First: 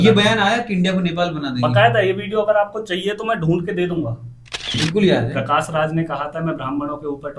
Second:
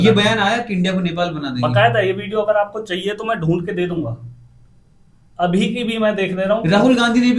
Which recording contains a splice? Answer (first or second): first